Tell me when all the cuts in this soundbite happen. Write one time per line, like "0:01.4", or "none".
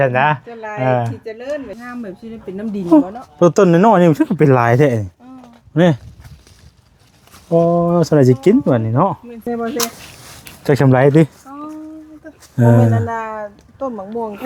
0:01.8
0:09.5